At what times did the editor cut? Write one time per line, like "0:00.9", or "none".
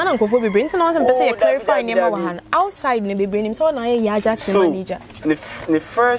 none